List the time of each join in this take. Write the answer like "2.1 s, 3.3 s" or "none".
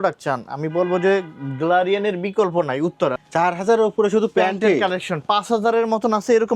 3.2 s